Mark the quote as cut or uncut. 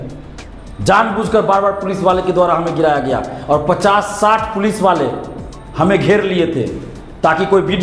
uncut